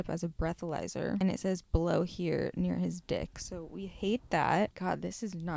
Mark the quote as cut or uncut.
cut